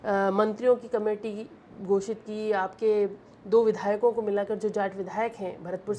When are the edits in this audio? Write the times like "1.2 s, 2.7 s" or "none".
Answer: none